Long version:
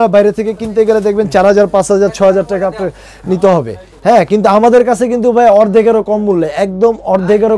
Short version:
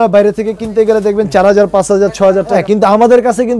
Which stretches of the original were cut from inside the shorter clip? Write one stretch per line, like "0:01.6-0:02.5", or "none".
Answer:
0:02.6-0:04.2